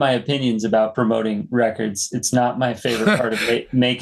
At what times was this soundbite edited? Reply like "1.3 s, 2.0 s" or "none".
0.9 s

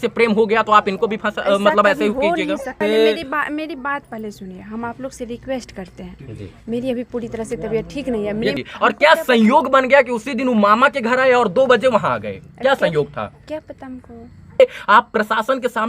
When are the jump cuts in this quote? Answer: 2.7 s, 8.6 s, 14.6 s

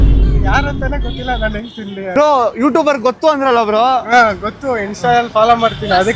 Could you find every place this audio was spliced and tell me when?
none

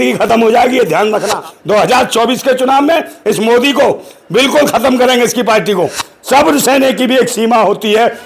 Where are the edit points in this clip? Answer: 1.5 s, 6.1 s

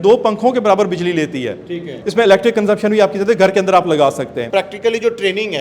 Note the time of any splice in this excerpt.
2.0 s, 4.4 s

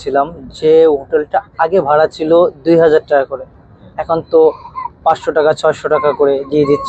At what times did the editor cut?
none

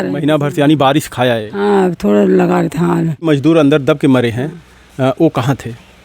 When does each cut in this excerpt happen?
3.3 s

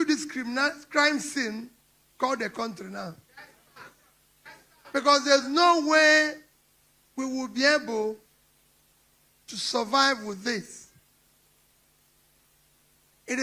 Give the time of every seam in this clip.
none

